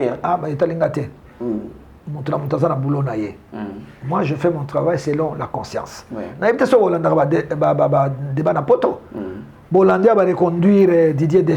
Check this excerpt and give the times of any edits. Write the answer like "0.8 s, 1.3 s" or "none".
none